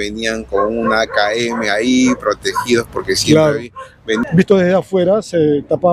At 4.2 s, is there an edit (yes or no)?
yes